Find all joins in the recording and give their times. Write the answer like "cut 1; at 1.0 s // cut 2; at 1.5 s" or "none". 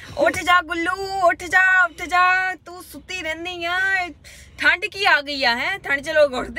none